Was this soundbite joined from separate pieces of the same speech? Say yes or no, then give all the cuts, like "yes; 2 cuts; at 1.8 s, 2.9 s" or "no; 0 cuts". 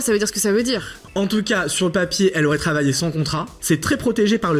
yes; 2 cuts; at 1.0 s, 3.5 s